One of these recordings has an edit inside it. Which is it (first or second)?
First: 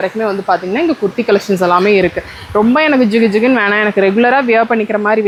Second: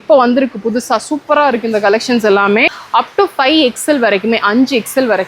second